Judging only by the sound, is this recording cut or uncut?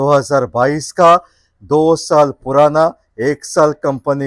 uncut